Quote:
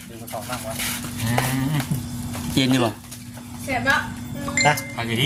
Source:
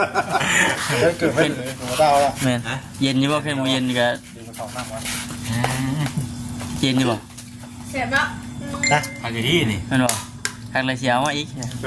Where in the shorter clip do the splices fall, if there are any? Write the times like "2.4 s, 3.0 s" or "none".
none